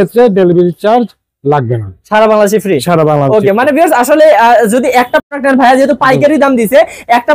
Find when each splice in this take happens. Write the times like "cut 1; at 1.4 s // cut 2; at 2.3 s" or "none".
none